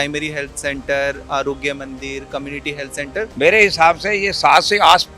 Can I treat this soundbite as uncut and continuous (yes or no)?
no